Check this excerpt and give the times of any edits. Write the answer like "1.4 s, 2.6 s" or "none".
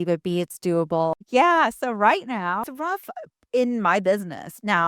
1.1 s, 2.7 s